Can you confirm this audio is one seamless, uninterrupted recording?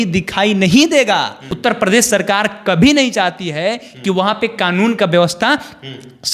no; 1 cut; at 1.5 s

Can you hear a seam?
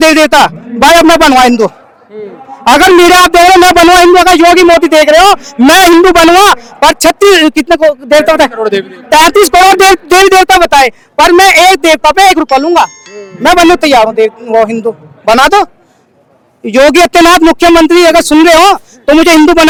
no; 0 cuts

